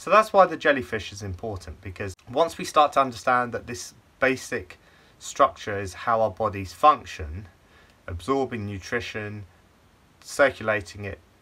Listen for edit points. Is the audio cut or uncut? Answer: cut